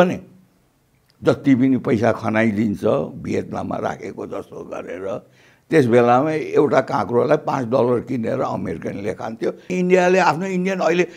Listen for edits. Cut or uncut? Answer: cut